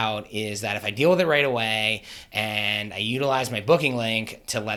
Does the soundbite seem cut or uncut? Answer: uncut